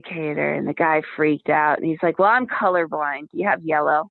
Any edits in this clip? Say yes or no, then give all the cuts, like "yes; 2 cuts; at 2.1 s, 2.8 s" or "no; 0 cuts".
no; 0 cuts